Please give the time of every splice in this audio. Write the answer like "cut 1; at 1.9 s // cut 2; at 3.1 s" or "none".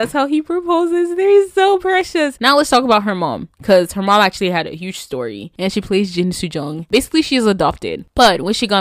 cut 1; at 2.4 s // cut 2; at 5.4 s // cut 3; at 6.8 s